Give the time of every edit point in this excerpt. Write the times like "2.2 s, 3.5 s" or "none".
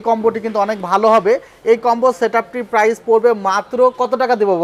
none